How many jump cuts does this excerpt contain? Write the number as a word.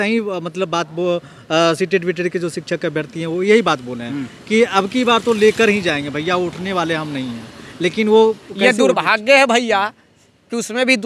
zero